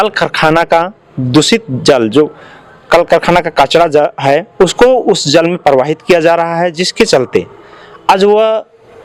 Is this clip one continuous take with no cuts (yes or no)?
yes